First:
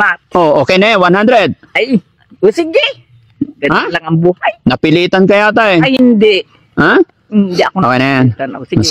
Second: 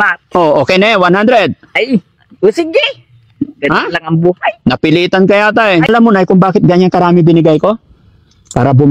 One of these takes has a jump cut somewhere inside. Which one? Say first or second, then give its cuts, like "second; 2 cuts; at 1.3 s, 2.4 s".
second; 1 cut; at 5.9 s